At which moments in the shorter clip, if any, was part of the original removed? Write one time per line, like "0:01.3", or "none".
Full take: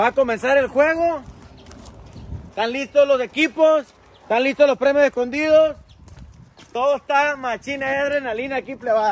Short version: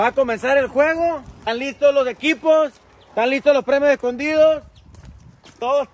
0:01.3